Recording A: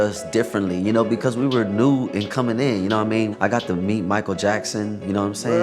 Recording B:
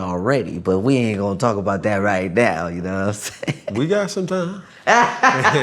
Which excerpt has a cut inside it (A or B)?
A